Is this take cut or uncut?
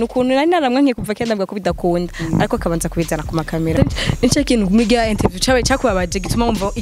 cut